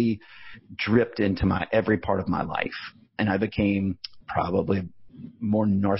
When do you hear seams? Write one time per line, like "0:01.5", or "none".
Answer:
none